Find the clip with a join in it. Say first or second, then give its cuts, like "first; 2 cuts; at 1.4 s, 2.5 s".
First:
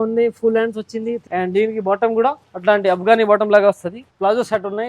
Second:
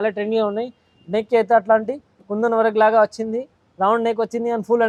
first; 3 cuts; at 1.2 s, 2.5 s, 4.0 s